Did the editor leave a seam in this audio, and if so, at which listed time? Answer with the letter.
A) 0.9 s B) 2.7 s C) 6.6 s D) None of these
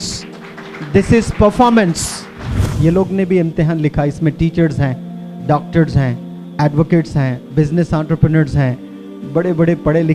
B